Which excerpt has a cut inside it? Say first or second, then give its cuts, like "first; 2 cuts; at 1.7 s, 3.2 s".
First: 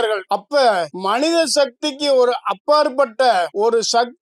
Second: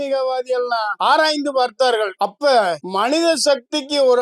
second; 1 cut; at 1.0 s